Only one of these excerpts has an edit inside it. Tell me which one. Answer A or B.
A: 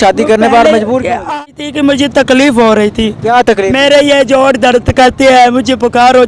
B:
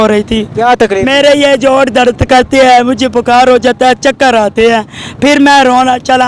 A